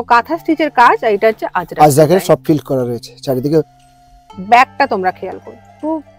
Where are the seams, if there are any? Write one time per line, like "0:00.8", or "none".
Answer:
0:03.7